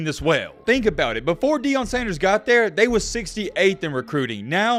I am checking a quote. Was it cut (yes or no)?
no